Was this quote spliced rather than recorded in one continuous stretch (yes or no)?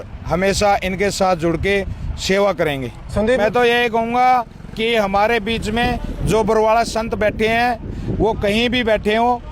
yes